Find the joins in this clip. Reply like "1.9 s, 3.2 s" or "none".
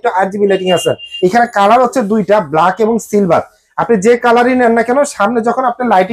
1.1 s

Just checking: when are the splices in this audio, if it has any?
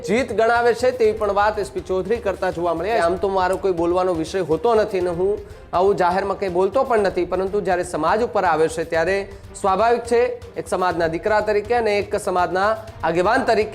3.0 s

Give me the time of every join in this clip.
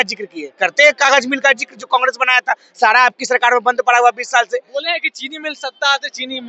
none

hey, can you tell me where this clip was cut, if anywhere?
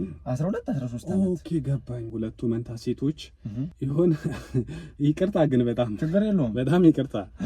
2.0 s, 3.7 s

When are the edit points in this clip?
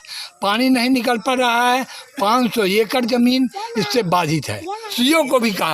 4.8 s

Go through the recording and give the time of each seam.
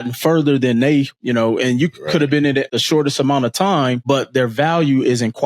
1.2 s, 2.7 s, 4.0 s

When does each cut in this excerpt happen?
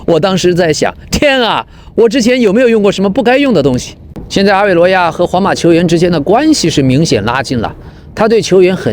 4.0 s

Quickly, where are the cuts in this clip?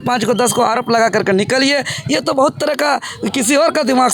none

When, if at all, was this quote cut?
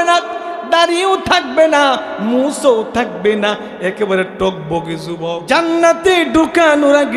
5.4 s

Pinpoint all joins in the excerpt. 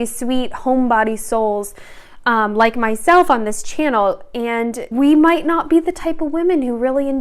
4.8 s

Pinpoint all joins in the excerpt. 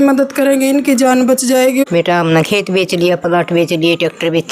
1.8 s

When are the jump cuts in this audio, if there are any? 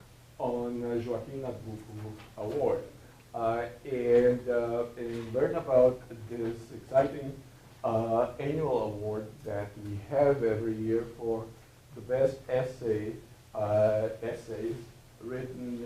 6.4 s

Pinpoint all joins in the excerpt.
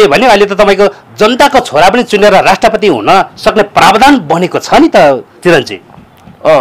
none

